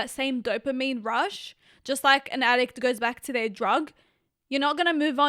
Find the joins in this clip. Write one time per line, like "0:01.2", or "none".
none